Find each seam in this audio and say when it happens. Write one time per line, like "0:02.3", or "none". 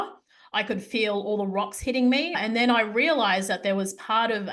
0:02.4